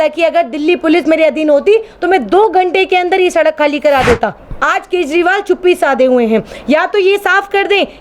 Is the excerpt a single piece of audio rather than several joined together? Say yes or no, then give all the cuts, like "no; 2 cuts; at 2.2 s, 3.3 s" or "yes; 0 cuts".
no; 1 cut; at 4.5 s